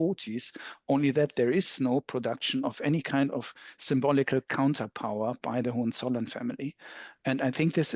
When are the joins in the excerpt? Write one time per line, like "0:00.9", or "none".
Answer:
none